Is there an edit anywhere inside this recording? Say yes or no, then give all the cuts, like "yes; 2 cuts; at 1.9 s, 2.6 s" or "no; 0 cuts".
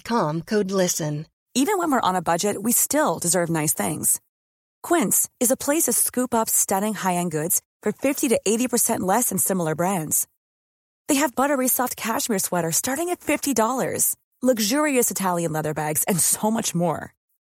yes; 1 cut; at 1.3 s